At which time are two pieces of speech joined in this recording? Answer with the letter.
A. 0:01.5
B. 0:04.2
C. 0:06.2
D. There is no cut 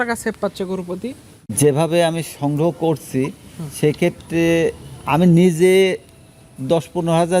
A